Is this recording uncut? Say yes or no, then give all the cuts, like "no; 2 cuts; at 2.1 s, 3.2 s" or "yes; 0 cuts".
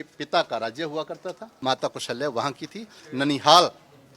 no; 2 cuts; at 1.5 s, 3.0 s